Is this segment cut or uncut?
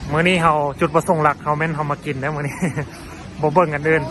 uncut